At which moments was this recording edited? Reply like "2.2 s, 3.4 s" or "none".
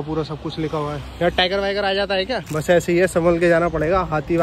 2.5 s